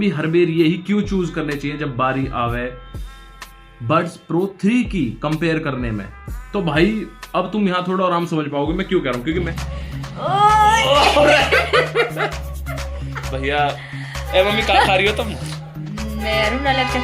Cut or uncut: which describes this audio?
cut